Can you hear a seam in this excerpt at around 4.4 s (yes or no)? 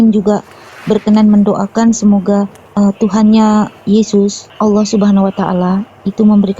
yes